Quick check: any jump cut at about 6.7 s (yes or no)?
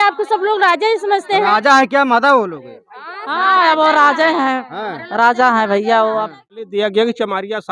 yes